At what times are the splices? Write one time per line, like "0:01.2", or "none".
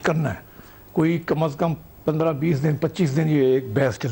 none